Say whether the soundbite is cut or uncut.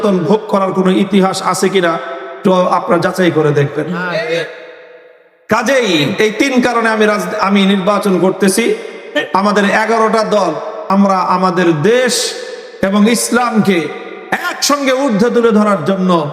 cut